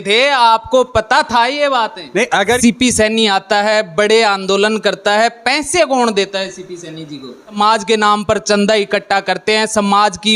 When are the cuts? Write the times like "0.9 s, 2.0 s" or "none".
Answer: 2.6 s, 7.5 s

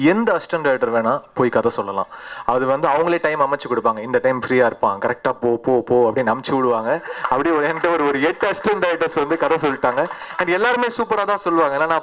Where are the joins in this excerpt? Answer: none

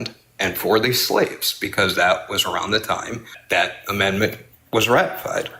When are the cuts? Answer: 3.3 s

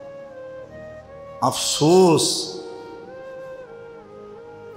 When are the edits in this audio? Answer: 1.4 s

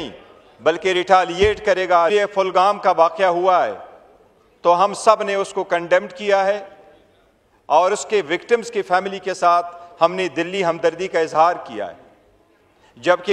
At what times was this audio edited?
2.1 s

